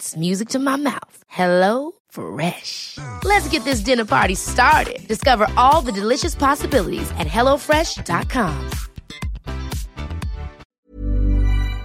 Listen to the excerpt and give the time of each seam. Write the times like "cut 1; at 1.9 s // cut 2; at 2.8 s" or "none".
cut 1; at 10.7 s